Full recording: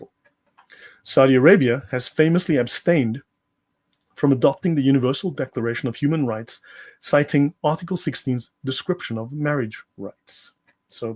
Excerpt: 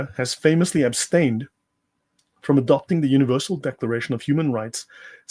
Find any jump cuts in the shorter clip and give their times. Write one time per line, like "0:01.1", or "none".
none